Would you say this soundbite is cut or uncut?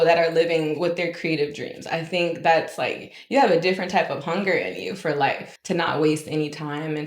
cut